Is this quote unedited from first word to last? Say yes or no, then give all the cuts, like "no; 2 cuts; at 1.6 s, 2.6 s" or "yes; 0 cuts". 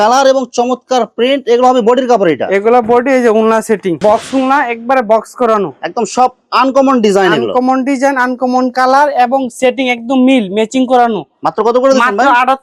yes; 0 cuts